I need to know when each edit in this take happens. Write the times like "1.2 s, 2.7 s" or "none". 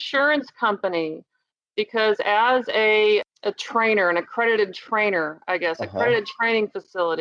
3.2 s